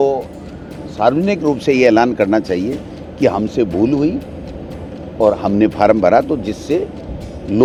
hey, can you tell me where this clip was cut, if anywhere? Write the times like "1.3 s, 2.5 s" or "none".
none